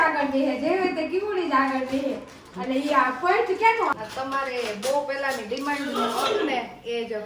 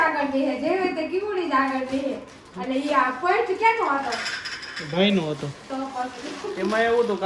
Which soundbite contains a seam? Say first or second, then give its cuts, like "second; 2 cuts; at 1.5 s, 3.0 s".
first; 1 cut; at 3.9 s